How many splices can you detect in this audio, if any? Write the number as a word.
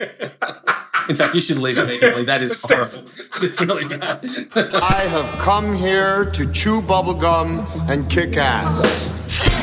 one